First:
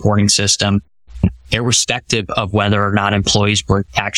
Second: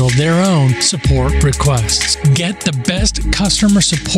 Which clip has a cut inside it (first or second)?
first